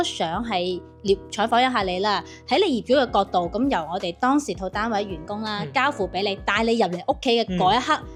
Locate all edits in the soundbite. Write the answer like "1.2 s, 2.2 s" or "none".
none